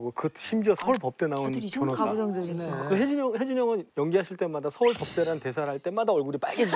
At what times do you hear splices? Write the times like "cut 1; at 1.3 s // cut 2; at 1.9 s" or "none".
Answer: none